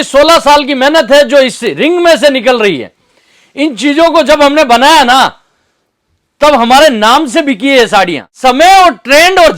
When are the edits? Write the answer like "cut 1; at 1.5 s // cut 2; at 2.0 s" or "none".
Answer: cut 1; at 8.2 s